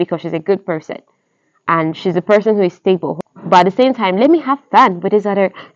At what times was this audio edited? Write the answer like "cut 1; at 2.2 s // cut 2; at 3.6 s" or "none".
cut 1; at 3.1 s